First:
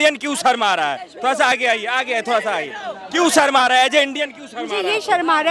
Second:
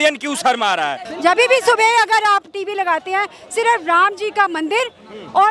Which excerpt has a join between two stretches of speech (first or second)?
second